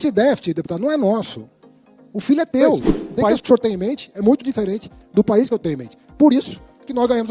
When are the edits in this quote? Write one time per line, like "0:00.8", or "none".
0:03.2

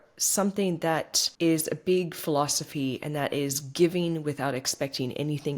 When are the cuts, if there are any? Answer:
0:01.2

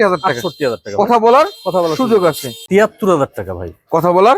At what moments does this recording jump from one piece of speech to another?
0:02.6

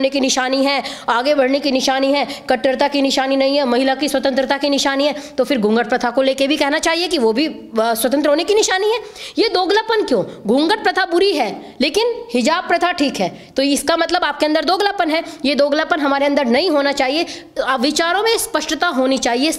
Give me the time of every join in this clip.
none

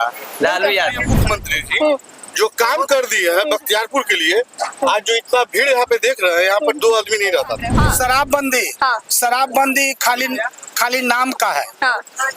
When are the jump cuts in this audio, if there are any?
0:01.1
0:07.7

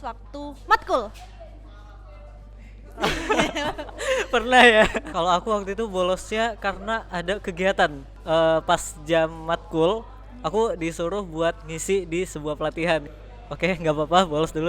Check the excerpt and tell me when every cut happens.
0:05.0
0:08.1
0:13.1

